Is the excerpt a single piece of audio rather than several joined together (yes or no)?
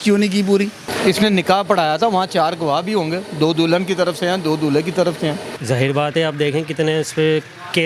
no